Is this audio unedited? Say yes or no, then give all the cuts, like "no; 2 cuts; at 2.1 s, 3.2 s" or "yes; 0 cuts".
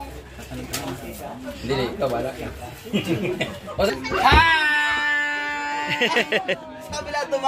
no; 1 cut; at 3.9 s